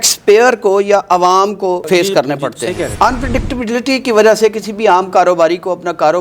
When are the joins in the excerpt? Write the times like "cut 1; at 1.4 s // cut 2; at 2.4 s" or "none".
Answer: cut 1; at 1.8 s // cut 2; at 2.9 s